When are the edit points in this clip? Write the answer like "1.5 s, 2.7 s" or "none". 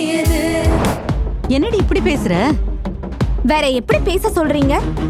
1.0 s